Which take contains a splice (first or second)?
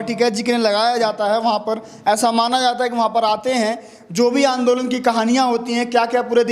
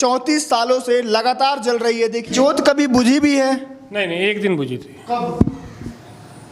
second